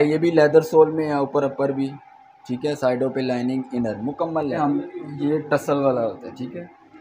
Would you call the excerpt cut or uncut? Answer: cut